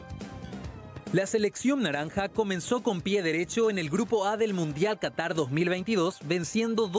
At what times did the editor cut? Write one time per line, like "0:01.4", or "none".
0:01.1